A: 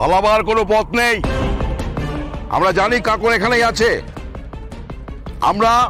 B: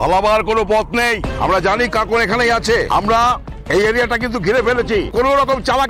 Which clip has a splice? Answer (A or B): B